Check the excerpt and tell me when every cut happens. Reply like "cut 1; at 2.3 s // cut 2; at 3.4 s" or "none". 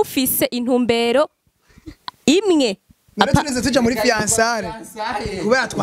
none